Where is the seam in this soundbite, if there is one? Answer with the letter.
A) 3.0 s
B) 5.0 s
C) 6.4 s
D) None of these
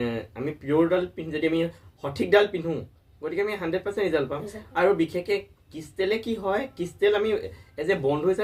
D